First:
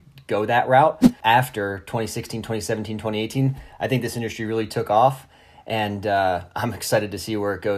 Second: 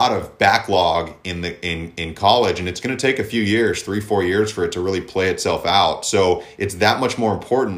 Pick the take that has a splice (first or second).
first